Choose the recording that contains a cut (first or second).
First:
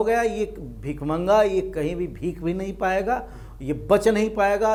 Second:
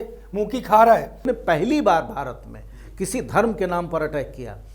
second